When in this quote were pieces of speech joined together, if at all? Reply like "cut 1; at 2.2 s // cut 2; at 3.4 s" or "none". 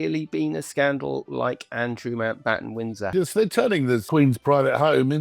cut 1; at 3.1 s // cut 2; at 4.1 s

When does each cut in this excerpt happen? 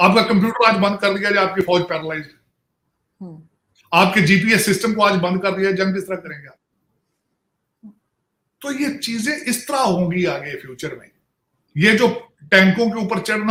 none

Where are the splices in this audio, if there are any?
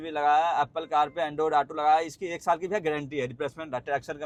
none

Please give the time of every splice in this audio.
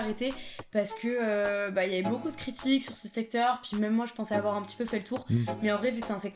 none

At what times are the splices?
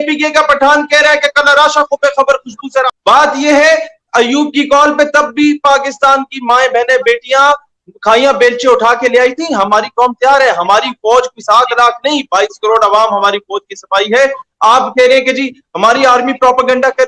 none

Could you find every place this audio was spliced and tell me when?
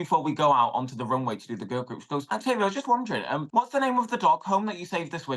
cut 1; at 2.2 s // cut 2; at 3.4 s

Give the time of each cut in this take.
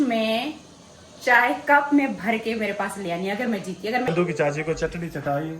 cut 1; at 4.1 s

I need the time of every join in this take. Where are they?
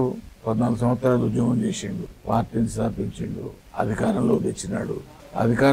cut 1; at 2.1 s

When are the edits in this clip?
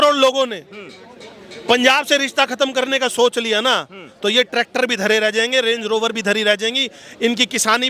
none

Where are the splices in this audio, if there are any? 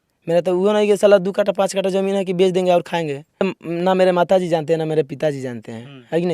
cut 1; at 3.4 s

